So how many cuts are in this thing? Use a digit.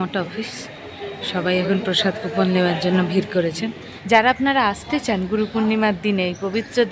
1